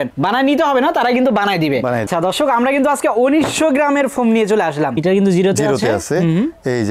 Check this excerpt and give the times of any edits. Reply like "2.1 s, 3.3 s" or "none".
2.1 s, 5.0 s